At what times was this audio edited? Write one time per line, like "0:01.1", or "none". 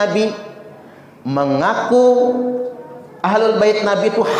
none